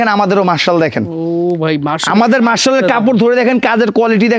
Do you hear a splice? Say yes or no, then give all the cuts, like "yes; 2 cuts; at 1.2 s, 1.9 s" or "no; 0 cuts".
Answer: no; 0 cuts